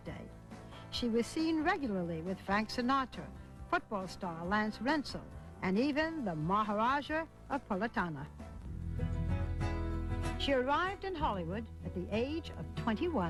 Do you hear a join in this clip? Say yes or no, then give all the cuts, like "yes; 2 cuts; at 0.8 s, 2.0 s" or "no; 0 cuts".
no; 0 cuts